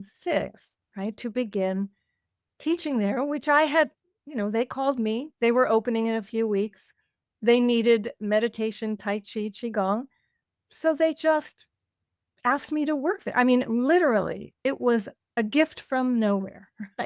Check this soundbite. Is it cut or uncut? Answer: uncut